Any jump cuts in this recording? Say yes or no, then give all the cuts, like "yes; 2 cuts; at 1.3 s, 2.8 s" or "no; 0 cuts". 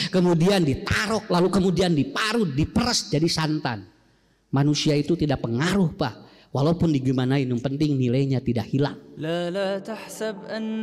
yes; 1 cut; at 9.3 s